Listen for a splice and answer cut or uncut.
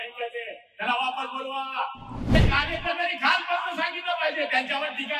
cut